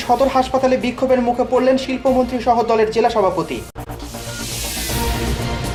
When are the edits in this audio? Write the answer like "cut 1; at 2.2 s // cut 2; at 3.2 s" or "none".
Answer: none